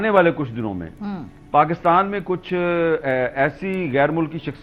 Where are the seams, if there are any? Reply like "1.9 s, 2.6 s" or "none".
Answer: none